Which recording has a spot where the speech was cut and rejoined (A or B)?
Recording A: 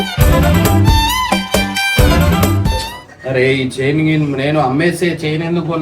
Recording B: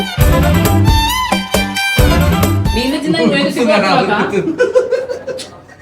A